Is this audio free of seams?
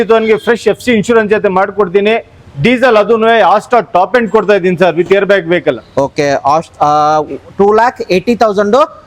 yes; 0 cuts

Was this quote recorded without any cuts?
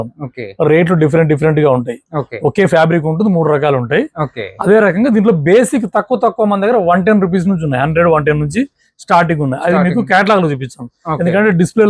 yes; 0 cuts

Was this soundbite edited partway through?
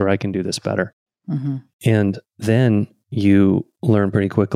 yes; 1 cut; at 1.5 s

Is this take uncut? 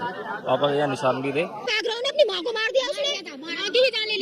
no; 1 cut; at 1.7 s

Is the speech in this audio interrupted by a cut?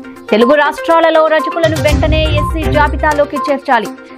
no; 0 cuts

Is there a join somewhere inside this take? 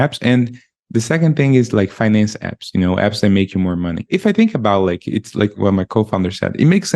yes; 2 cuts; at 4.0 s, 5.6 s

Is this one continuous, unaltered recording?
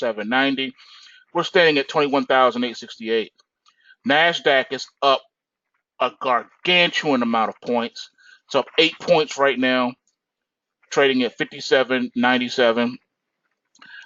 no; 1 cut; at 11.6 s

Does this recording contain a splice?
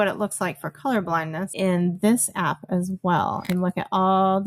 yes; 2 cuts; at 1.5 s, 3.5 s

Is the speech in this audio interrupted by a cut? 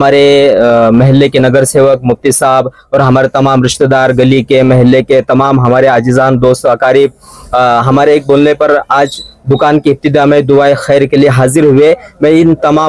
no; 0 cuts

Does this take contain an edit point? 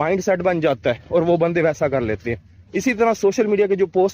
no; 0 cuts

